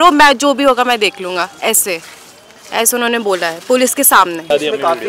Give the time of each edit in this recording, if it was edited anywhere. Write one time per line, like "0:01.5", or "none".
none

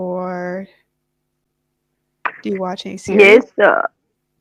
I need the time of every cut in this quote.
none

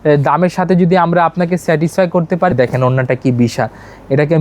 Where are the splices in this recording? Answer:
0:02.5

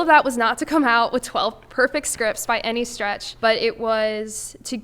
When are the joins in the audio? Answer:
0:03.3

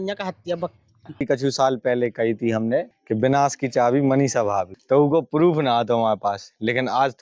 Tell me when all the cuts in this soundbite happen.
0:01.0
0:03.0
0:04.7

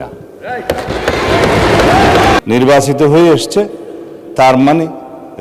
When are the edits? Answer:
0:02.4

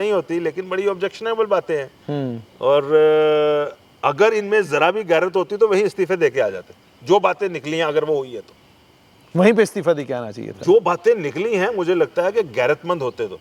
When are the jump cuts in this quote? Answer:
none

